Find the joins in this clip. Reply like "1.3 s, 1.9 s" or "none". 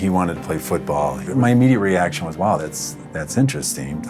1.2 s